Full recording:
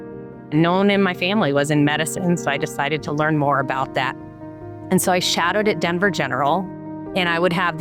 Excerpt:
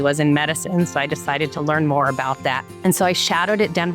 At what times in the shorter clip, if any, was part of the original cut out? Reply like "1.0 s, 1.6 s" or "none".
2.7 s